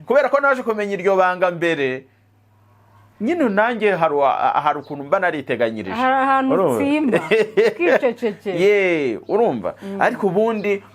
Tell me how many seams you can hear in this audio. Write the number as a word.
zero